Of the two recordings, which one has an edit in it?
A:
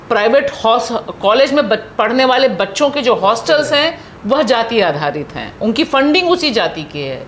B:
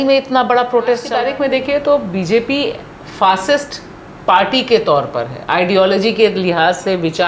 B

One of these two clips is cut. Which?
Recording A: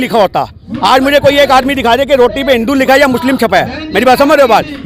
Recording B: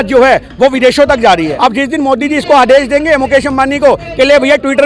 B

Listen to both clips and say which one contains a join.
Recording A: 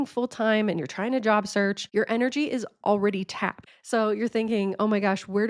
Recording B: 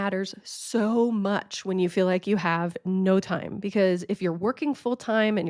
A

